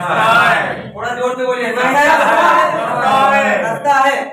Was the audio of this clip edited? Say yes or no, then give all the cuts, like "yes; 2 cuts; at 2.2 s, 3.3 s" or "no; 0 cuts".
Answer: no; 0 cuts